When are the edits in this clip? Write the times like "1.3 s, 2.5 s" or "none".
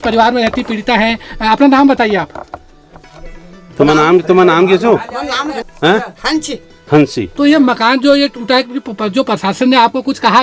5.7 s